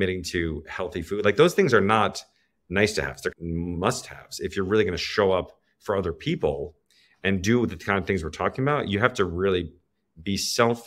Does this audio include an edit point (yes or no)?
yes